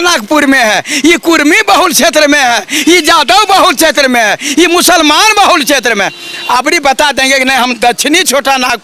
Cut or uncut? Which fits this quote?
uncut